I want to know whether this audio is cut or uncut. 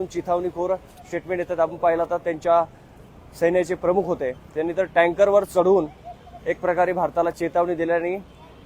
uncut